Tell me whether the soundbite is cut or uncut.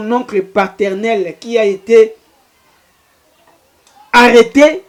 uncut